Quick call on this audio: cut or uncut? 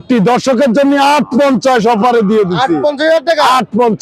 uncut